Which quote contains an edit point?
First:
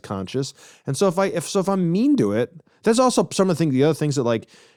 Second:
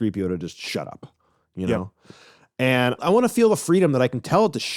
second; 1 cut; at 3.0 s

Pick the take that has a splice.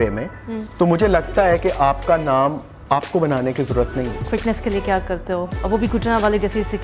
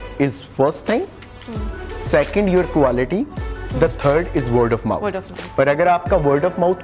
first; 2 cuts; at 4.2 s, 5.5 s

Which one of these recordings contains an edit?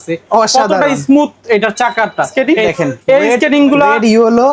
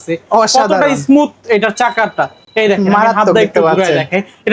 first; 1 cut; at 2.3 s

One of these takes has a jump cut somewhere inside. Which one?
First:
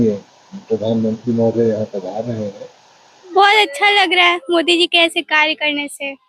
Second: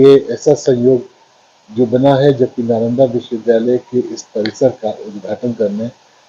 first; 1 cut; at 3.3 s

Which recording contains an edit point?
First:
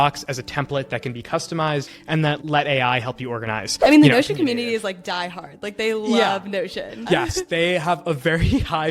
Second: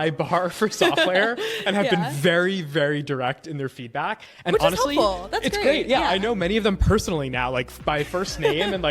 first; 3 cuts; at 2.2 s, 3.6 s, 7.0 s

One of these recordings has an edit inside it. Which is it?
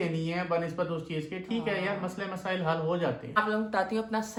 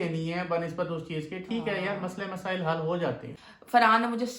second; 1 cut; at 3.3 s

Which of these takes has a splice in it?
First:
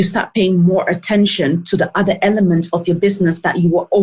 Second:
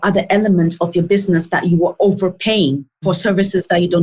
second; 1 cut; at 3.0 s

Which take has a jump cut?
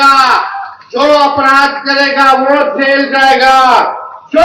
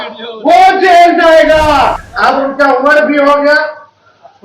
second; 1 cut; at 2.1 s

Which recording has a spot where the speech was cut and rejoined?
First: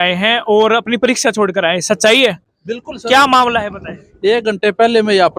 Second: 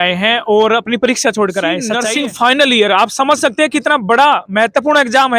second; 1 cut; at 1.9 s

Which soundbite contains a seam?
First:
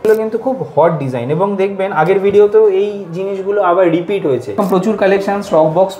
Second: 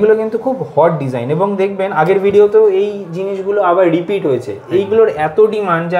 first; 1 cut; at 4.6 s

